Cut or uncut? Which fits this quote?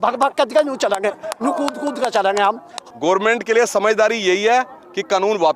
cut